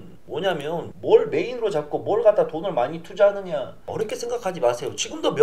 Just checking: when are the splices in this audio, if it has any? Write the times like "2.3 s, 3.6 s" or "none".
0.9 s, 3.9 s